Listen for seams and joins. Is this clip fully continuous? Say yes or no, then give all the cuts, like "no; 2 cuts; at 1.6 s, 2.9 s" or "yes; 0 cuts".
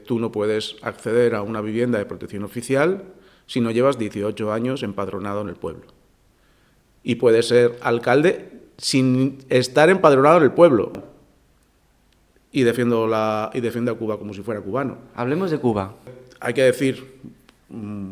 no; 2 cuts; at 10.9 s, 16.2 s